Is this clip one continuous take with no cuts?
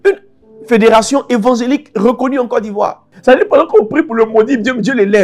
no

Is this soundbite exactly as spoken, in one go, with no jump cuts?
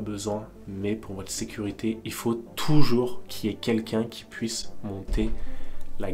yes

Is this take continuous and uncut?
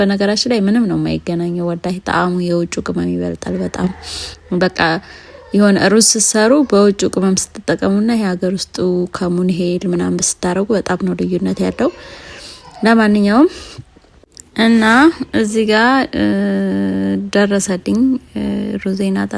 yes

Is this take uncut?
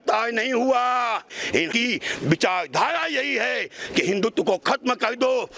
no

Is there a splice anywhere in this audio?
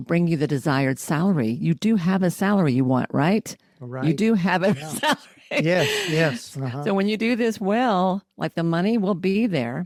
no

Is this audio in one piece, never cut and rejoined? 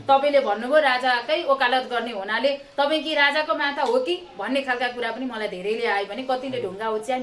yes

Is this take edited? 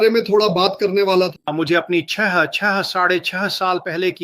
yes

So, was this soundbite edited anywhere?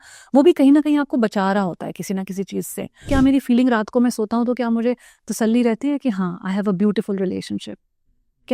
yes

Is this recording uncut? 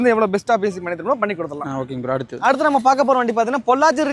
yes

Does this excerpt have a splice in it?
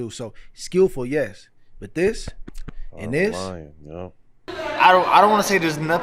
yes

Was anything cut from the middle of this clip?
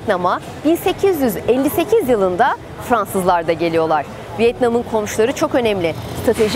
no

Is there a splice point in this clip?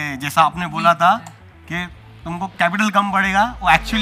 no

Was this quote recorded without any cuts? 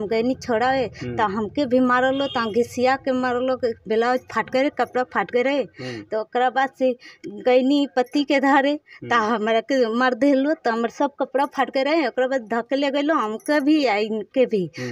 yes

